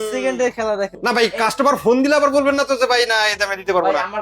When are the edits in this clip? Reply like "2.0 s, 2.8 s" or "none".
0.9 s